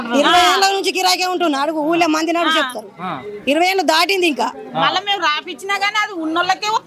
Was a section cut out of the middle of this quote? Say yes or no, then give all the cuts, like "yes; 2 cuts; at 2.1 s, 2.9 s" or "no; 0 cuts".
no; 0 cuts